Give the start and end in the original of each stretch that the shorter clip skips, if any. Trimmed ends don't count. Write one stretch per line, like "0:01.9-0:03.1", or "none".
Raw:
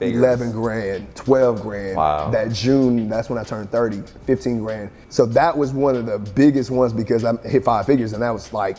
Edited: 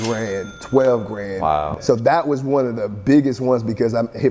0:02.2-0:05.0